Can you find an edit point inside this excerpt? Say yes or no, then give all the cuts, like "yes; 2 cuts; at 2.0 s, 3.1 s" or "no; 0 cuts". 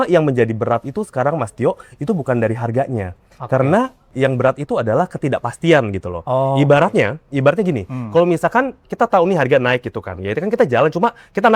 no; 0 cuts